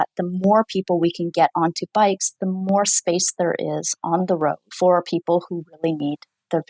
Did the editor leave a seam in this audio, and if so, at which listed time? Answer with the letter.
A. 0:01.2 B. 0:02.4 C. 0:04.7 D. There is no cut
C